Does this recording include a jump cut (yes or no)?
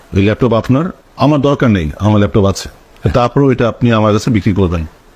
yes